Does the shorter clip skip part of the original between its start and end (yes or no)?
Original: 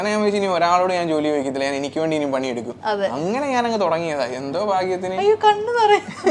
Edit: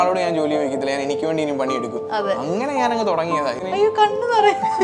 yes